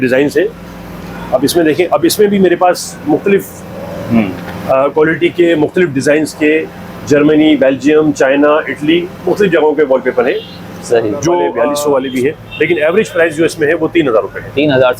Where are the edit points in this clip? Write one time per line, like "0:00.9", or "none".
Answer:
0:11.5